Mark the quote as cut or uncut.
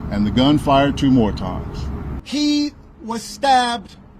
cut